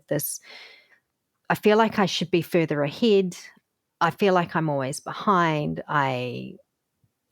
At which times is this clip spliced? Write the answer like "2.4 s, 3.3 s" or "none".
1.3 s